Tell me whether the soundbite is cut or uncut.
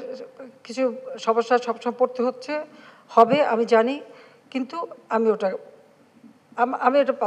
uncut